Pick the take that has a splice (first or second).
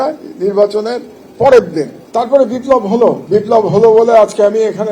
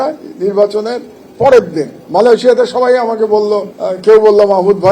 first